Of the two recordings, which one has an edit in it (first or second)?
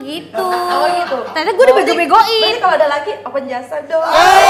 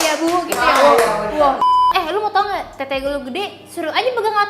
second